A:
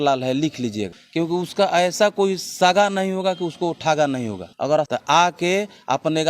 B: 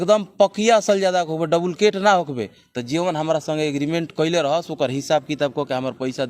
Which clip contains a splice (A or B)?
A